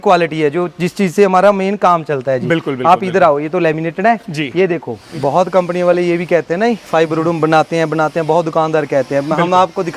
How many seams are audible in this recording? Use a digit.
1